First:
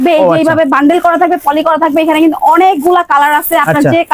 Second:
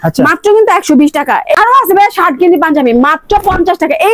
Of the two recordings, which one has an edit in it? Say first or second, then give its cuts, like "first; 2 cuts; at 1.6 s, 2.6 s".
second; 1 cut; at 1.5 s